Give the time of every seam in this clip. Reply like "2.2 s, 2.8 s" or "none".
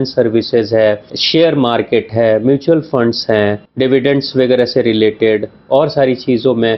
1.1 s, 3.6 s